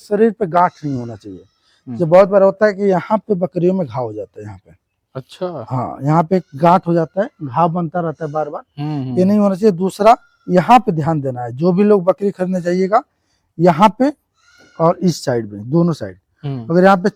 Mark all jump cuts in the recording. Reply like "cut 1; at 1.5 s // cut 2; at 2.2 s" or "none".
none